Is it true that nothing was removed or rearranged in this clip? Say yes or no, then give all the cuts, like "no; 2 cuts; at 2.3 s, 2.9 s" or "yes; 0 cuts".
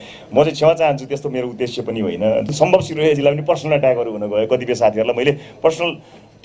no; 1 cut; at 2.5 s